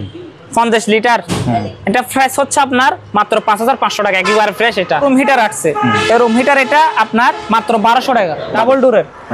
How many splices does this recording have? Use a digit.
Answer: 2